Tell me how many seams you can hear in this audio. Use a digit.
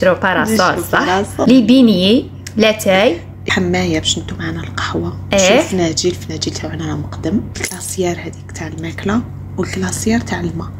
3